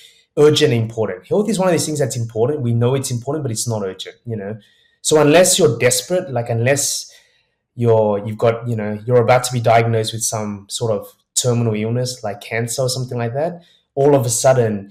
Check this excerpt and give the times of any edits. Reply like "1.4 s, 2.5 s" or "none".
none